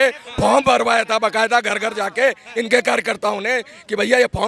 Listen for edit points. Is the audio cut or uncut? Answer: uncut